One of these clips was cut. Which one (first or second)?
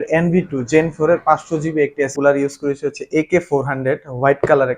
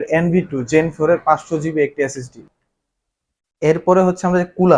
first